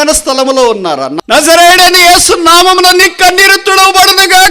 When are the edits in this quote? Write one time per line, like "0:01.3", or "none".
0:01.1